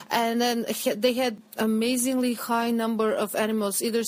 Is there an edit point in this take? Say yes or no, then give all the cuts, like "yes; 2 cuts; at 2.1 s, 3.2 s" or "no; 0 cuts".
yes; 1 cut; at 1.3 s